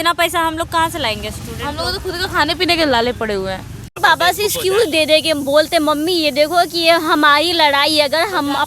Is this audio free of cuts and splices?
no; 1 cut; at 4.0 s

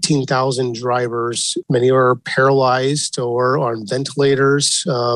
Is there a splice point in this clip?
yes; 1 cut; at 1.6 s

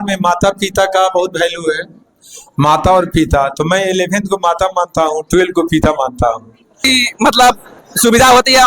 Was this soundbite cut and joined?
yes; 1 cut; at 6.8 s

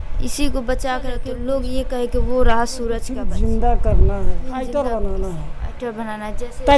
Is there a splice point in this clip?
yes; 3 cuts; at 1.3 s, 3.2 s, 4.5 s

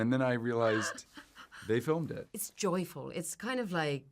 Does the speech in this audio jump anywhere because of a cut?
yes; 1 cut; at 2.3 s

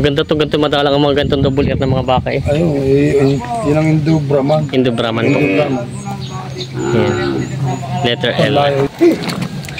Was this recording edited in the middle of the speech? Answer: yes; 1 cut; at 8.9 s

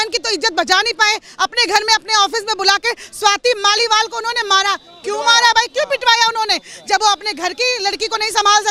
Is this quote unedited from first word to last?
yes; 0 cuts

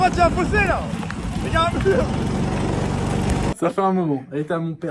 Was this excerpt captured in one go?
no; 1 cut; at 3.5 s

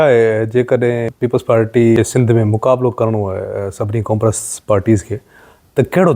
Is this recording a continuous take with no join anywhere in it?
no; 2 cuts; at 1.1 s, 2.0 s

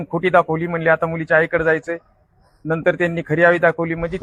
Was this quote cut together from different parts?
no; 0 cuts

